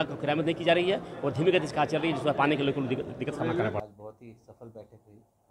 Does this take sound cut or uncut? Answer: cut